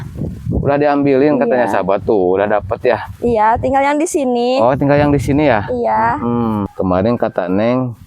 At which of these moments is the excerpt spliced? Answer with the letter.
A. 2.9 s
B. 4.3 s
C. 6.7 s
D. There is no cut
C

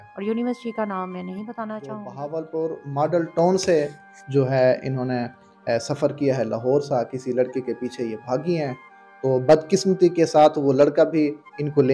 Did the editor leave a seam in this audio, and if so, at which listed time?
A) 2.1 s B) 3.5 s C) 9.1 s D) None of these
A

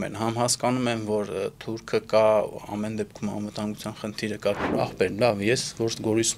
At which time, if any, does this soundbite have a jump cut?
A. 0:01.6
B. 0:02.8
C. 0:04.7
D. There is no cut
C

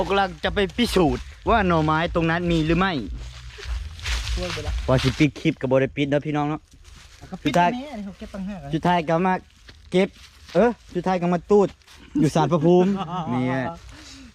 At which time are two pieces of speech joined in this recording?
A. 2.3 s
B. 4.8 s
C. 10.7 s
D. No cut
B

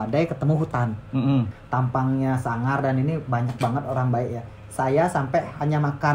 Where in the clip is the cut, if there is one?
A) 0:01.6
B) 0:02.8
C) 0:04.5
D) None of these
A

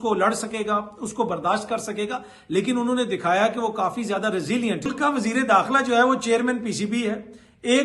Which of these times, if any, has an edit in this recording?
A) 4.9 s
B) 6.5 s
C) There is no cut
A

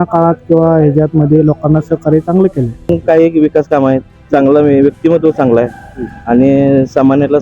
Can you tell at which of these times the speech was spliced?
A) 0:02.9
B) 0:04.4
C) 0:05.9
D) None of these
A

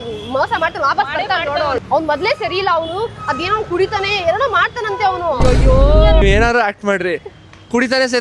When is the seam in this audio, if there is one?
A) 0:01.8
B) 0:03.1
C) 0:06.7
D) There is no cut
A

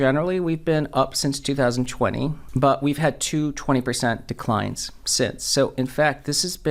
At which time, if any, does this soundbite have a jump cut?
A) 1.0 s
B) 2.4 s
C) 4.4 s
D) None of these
B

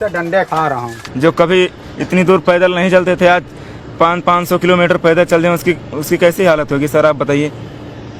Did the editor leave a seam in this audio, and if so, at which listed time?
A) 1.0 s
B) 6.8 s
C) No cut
A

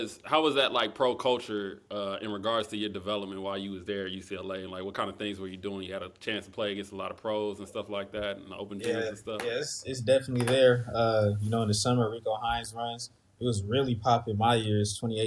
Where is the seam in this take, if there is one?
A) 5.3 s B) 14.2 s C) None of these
C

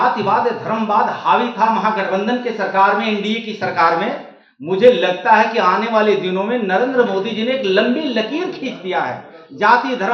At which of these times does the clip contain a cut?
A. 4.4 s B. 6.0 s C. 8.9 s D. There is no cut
D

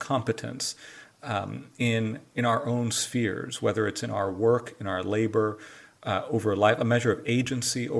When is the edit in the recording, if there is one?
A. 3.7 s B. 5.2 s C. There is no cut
C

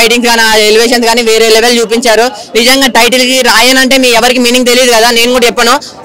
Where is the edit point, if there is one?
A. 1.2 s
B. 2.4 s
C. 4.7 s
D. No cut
D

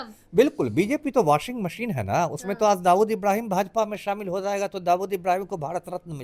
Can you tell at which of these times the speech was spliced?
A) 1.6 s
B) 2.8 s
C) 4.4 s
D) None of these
D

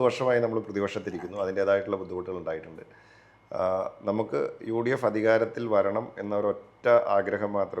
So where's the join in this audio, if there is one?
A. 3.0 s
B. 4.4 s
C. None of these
C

